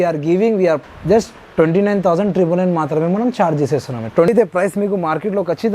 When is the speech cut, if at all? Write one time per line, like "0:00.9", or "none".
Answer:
0:00.8
0:04.3